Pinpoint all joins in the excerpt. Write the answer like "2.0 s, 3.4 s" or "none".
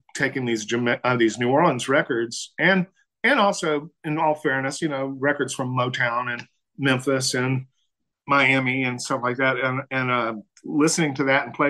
none